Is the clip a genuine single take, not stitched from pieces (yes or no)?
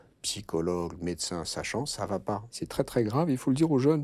no